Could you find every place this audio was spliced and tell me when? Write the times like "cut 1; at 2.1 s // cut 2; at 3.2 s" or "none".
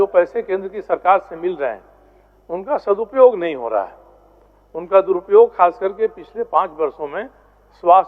none